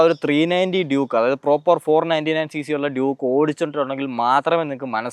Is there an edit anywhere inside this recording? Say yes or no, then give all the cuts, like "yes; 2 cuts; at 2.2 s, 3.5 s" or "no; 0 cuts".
no; 0 cuts